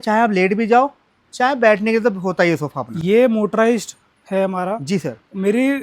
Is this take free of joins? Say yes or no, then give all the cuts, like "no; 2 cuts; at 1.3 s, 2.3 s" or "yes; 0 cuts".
yes; 0 cuts